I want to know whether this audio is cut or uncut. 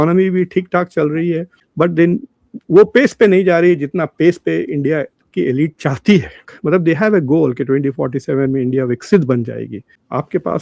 cut